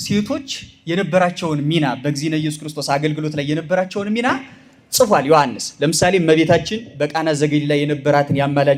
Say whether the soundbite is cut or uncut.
uncut